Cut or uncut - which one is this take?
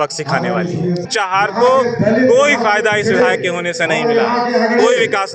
cut